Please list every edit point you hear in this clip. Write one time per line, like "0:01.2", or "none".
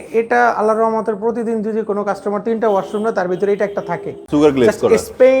0:04.2

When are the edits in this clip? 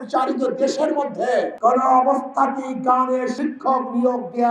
0:01.5
0:03.3

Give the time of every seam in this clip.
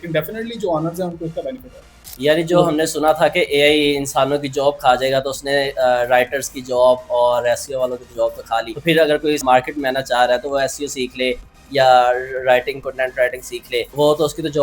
0:01.9
0:08.7
0:09.4

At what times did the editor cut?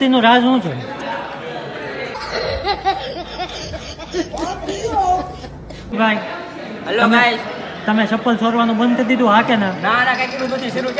none

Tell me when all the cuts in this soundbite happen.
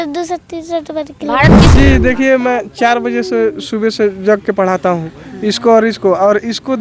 0:01.7

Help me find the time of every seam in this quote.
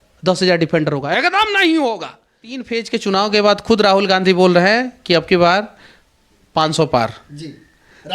0:02.7

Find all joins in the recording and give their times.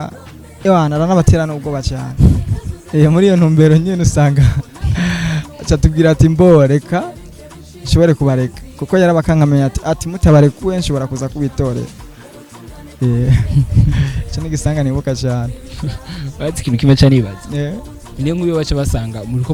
none

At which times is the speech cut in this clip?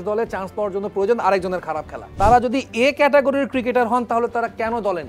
0:02.0

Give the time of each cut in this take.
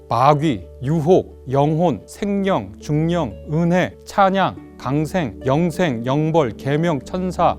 0:01.2
0:02.1
0:04.0
0:05.3

